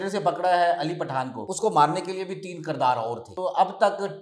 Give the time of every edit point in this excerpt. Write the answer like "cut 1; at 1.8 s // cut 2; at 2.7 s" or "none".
cut 1; at 1.4 s // cut 2; at 3.3 s

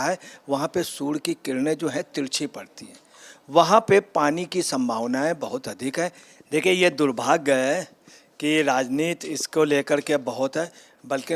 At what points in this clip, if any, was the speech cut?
cut 1; at 6.3 s

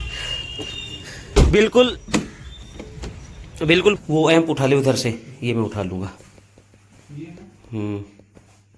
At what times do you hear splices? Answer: cut 1; at 4.0 s

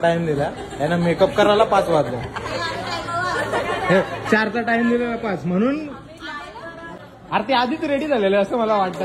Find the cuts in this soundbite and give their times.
cut 1; at 7.0 s

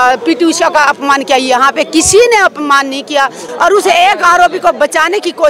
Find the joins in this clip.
cut 1; at 3.5 s

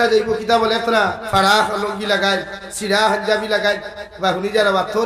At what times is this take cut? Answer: cut 1; at 1.2 s

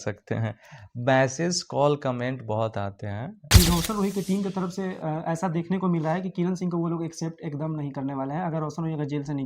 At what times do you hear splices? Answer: cut 1; at 3.4 s

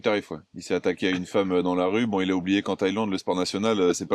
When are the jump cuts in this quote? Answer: none

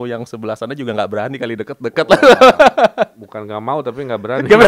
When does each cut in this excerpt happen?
none

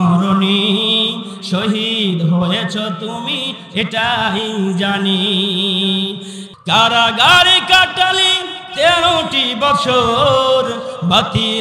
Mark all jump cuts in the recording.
cut 1; at 6.4 s

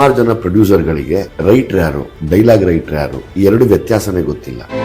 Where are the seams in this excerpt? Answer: cut 1; at 1.3 s // cut 2; at 2.1 s // cut 3; at 3.2 s

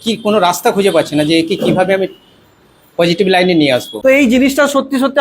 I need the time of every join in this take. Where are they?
cut 1; at 3.9 s

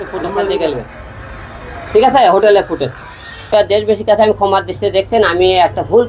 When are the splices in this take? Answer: cut 1; at 3.5 s

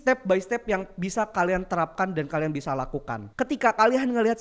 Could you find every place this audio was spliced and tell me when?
cut 1; at 3.2 s

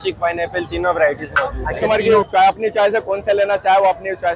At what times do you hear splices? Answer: cut 1; at 1.8 s

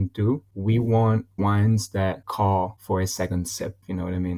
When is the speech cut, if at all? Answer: none

